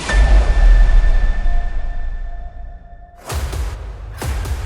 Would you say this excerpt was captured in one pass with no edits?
yes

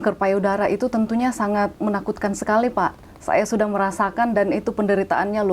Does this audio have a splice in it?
no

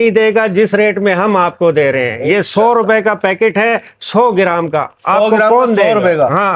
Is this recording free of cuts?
yes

